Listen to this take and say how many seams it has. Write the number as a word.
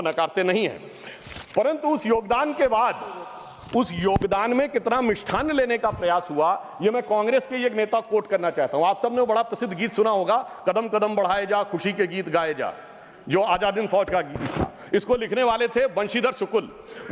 zero